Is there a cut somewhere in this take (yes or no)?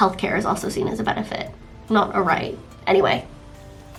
no